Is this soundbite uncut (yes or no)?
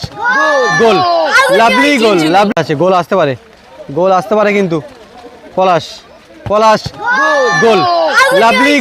no